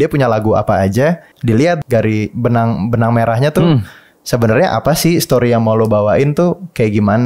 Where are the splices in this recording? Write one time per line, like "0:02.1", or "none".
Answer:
0:01.7